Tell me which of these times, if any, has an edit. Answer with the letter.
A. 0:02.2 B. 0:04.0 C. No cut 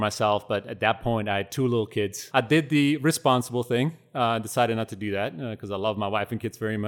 A